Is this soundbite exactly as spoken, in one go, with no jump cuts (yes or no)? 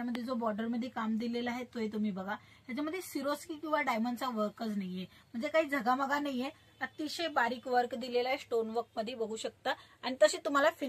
yes